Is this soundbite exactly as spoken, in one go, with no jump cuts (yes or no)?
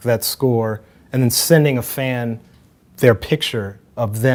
yes